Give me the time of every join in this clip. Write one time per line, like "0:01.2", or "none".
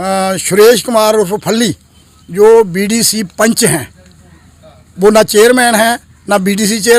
none